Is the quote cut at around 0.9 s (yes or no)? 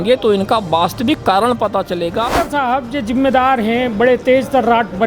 no